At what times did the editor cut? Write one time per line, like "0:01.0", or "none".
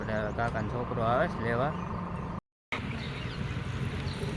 0:02.6